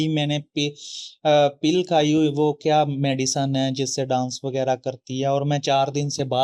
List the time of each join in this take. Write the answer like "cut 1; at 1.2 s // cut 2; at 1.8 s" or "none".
none